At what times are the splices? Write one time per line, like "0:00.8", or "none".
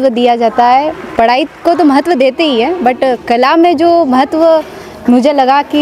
none